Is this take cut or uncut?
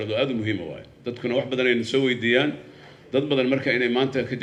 uncut